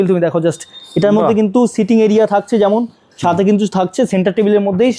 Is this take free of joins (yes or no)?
yes